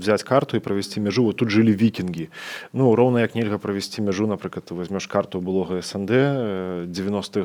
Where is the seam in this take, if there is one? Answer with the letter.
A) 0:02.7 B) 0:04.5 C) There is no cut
C